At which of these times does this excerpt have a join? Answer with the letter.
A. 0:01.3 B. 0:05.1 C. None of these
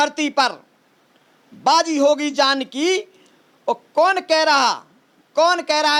C